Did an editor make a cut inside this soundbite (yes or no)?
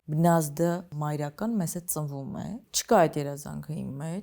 yes